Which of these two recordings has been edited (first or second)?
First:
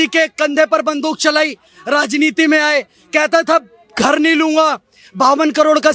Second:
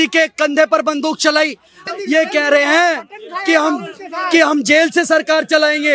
second